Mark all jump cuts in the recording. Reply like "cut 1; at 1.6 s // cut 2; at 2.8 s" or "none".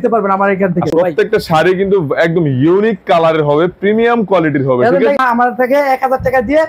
cut 1; at 0.9 s // cut 2; at 5.2 s